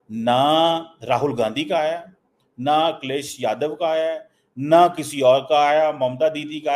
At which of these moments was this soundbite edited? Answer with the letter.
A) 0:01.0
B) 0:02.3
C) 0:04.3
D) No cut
D